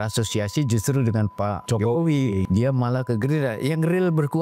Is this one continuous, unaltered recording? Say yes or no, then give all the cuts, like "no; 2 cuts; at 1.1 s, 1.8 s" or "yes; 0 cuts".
no; 2 cuts; at 1.6 s, 2.4 s